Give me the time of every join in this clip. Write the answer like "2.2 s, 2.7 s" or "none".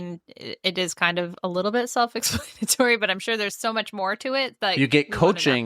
4.7 s